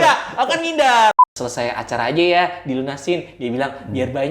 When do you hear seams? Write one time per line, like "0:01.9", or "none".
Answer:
0:01.1